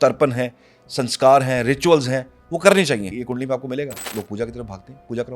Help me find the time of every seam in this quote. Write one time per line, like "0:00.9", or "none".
0:03.2
0:04.0